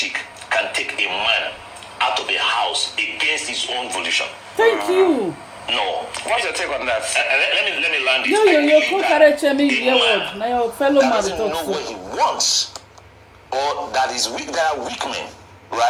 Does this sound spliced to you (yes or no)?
no